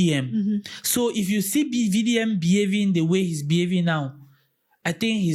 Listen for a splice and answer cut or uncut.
uncut